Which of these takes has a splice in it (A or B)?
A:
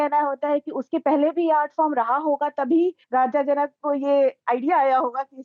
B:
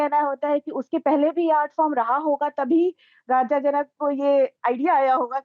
A